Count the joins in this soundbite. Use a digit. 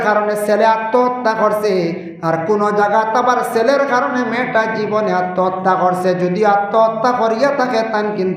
0